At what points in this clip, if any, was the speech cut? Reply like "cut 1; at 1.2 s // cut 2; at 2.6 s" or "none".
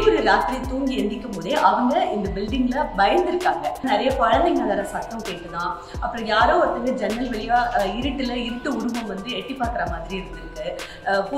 cut 1; at 3.8 s

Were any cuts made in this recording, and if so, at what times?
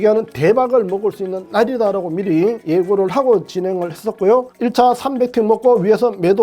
cut 1; at 4.5 s

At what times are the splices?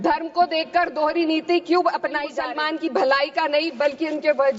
cut 1; at 2.3 s

